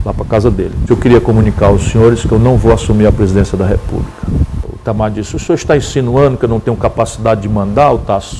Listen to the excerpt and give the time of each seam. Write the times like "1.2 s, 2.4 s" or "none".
0.8 s, 4.7 s